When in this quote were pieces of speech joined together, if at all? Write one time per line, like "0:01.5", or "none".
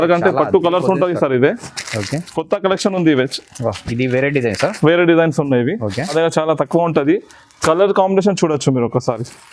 0:06.1